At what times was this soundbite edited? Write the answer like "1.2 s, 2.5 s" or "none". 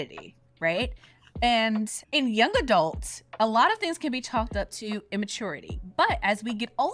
5.7 s